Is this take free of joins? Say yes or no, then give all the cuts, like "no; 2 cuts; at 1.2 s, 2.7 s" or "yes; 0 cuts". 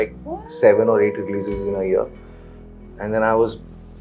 yes; 0 cuts